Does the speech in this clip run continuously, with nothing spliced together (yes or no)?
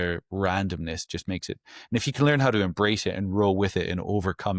yes